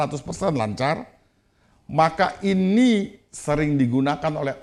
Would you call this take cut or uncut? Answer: uncut